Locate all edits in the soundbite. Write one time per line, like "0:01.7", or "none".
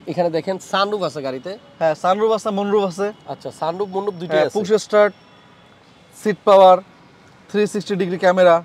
none